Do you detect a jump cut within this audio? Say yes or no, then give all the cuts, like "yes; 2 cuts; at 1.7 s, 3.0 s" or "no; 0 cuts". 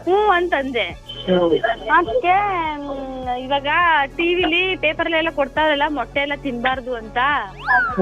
no; 0 cuts